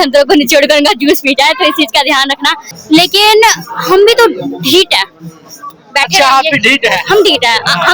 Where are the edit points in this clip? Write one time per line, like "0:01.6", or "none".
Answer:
0:02.7